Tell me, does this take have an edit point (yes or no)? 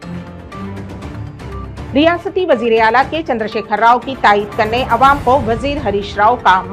yes